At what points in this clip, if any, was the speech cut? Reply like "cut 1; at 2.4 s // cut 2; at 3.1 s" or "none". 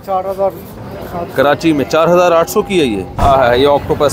cut 1; at 3.1 s